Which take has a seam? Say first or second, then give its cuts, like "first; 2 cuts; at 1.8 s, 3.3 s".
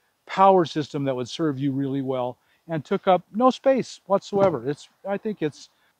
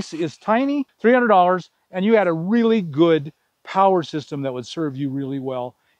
second; 1 cut; at 0.9 s